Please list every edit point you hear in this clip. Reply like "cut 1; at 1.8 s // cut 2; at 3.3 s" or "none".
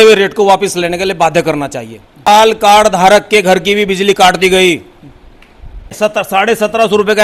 cut 1; at 2.2 s // cut 2; at 5.9 s